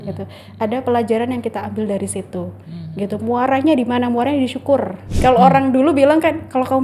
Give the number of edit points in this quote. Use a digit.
1